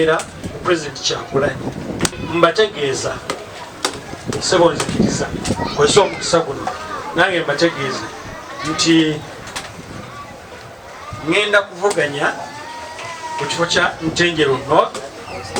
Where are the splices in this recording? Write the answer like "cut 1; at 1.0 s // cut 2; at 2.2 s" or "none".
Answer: cut 1; at 2.2 s